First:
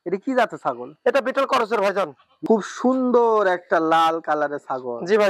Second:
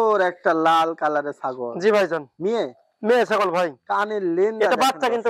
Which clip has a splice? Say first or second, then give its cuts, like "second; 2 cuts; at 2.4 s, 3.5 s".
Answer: first; 1 cut; at 2.3 s